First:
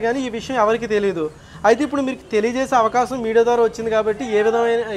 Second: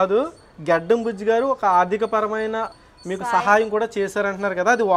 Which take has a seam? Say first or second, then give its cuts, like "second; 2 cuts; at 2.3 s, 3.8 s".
second; 1 cut; at 2.7 s